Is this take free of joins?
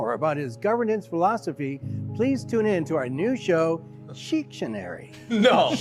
yes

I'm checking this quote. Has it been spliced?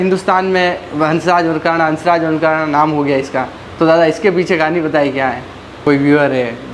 yes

